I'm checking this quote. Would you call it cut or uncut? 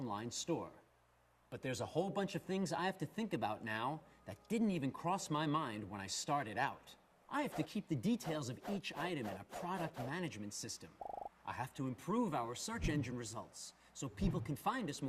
uncut